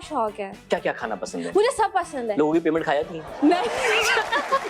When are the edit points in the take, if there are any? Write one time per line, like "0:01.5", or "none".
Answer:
none